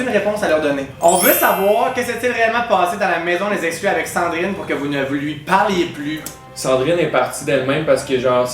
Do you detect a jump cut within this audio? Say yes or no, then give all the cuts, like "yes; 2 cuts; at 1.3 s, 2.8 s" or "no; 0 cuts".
yes; 2 cuts; at 1.0 s, 6.5 s